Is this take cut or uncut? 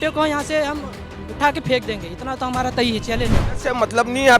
cut